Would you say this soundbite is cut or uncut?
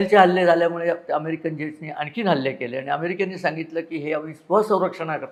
uncut